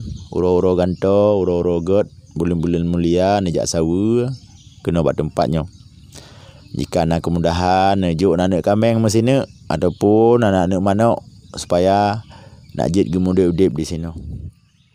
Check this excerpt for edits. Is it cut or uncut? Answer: uncut